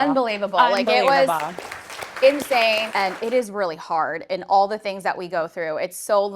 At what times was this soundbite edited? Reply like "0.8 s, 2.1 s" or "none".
2.9 s